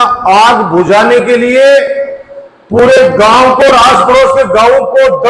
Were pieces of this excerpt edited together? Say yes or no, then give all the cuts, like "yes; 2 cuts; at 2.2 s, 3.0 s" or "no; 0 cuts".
no; 0 cuts